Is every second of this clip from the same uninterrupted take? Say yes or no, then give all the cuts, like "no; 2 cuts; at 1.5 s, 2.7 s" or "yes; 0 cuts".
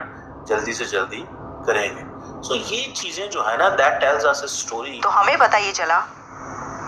no; 1 cut; at 4.9 s